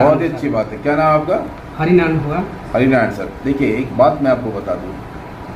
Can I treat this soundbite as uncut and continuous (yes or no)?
yes